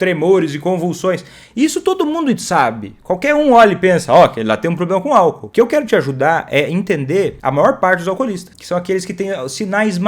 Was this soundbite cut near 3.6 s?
no; 3 cuts; at 5.4 s, 7.4 s, 8.5 s

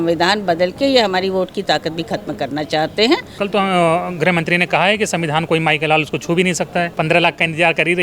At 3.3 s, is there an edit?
yes; 2 cuts; at 3.3 s, 6.9 s

